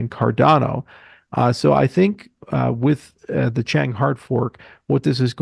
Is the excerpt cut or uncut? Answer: uncut